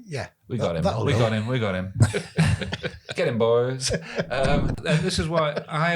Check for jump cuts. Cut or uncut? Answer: cut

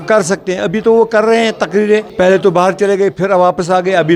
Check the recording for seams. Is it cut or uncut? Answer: cut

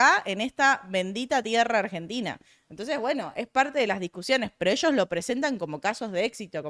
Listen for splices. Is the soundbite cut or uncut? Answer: uncut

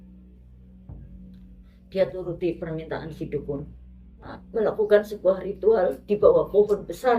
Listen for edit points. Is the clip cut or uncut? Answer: cut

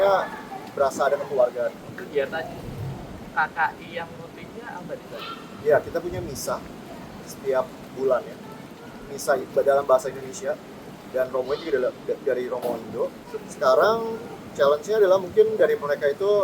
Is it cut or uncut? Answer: cut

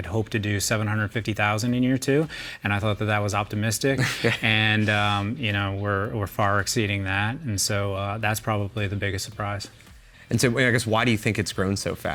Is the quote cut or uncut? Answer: uncut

